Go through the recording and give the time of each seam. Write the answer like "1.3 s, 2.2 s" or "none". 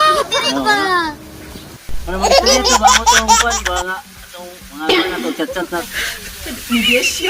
5.8 s